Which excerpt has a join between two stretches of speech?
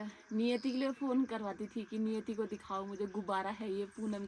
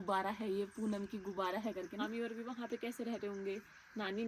second; 1 cut; at 2.1 s

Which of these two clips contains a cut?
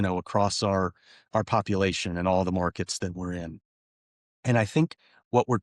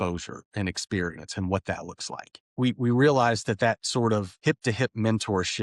second; 1 cut; at 4.3 s

